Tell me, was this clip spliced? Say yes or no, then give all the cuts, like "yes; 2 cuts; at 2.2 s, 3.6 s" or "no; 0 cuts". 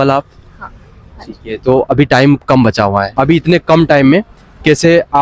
yes; 1 cut; at 3.1 s